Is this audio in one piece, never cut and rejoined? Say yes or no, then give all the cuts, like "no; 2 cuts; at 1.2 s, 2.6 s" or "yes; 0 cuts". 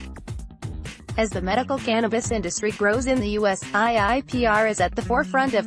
no; 1 cut; at 1.1 s